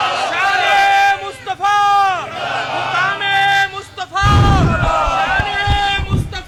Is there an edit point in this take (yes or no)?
no